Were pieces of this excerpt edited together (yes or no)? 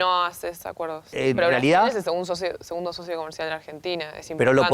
yes